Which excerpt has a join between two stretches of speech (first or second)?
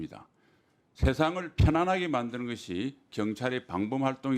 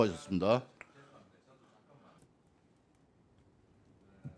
second